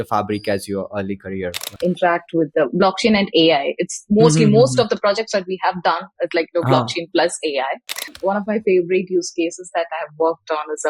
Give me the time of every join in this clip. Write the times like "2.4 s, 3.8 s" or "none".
1.8 s, 8.1 s